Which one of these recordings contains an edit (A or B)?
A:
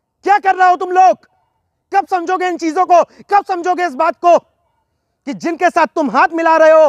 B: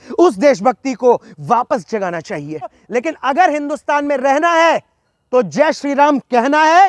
B